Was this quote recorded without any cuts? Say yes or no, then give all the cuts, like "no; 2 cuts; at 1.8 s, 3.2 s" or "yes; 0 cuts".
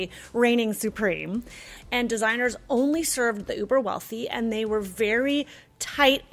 no; 1 cut; at 1.7 s